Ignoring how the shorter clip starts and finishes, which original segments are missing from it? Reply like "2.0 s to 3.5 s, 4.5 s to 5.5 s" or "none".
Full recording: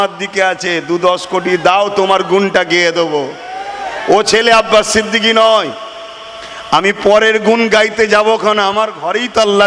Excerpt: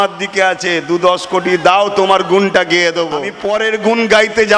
3.3 s to 7.0 s

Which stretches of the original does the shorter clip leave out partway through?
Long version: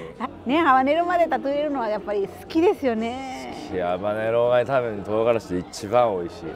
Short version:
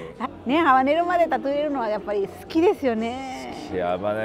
none

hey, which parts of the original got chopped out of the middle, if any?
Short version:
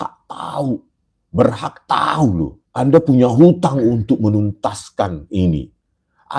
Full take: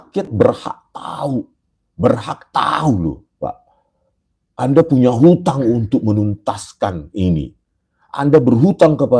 3.3 s to 4.4 s

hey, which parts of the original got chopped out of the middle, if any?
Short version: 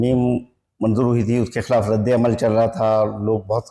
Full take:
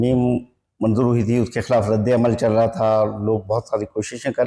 none

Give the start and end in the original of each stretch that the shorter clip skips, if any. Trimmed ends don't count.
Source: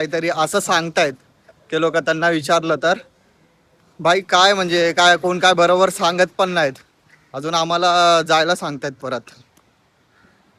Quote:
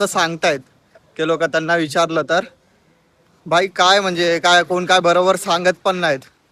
none

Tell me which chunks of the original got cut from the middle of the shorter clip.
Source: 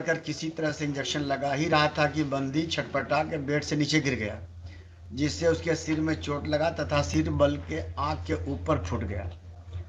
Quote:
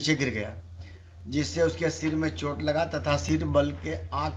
none

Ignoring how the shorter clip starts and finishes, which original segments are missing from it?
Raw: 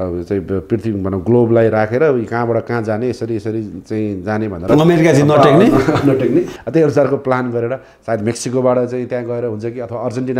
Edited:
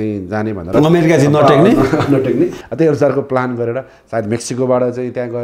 none

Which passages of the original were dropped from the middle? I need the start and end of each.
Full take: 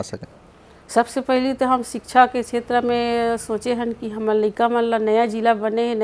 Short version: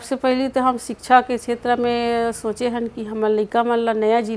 none

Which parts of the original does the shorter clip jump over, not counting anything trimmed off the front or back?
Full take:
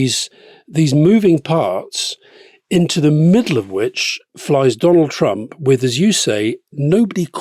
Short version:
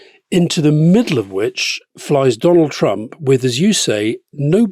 none

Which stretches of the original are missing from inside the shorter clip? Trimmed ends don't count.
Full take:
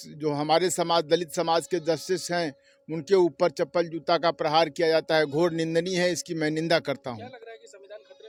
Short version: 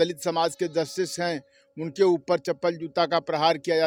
none

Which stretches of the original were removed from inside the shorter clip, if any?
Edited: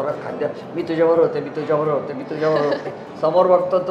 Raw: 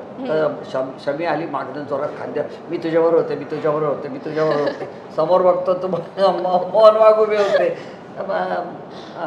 none

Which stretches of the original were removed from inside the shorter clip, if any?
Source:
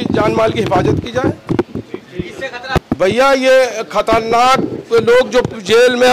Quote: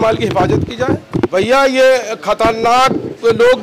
1.7 s to 3.0 s

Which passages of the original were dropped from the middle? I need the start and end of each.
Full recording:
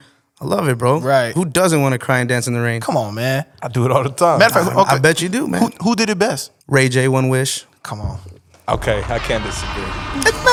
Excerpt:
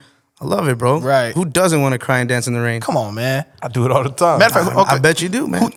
none

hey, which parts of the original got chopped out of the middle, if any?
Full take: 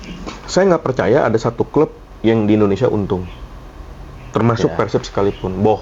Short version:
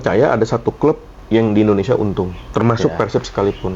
3.3 s to 4.2 s

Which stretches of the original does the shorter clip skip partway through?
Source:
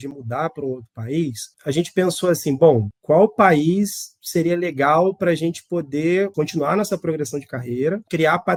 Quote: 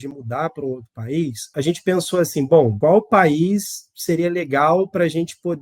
1.4 s to 1.5 s, 2.8 s to 3.0 s

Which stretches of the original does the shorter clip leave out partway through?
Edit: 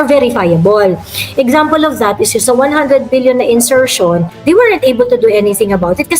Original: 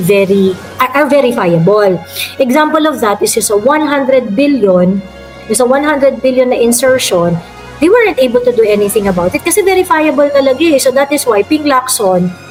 3.4 s to 5.5 s, 7.4 s to 7.7 s

